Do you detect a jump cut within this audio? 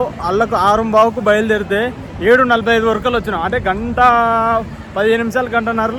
no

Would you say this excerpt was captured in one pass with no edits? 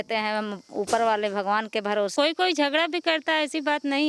no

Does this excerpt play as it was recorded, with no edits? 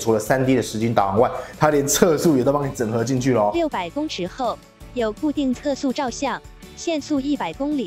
yes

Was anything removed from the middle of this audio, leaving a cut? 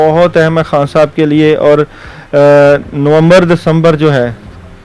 no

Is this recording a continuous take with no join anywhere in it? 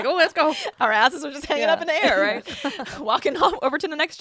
yes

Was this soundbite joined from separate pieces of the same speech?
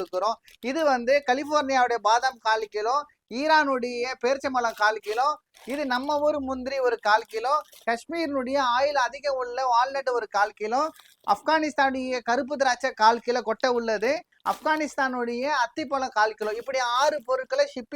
no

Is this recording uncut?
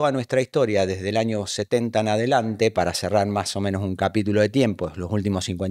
yes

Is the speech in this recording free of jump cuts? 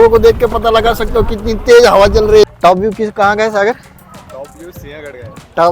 no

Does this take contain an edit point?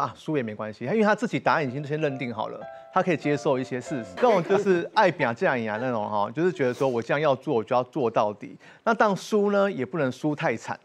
yes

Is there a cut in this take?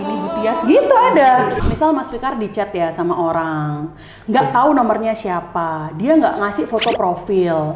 yes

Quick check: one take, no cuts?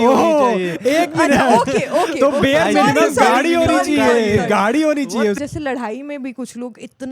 no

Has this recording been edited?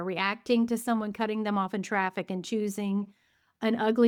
no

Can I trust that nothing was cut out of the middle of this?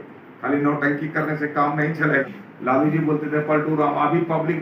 no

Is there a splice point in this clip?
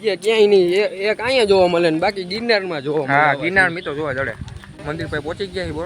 yes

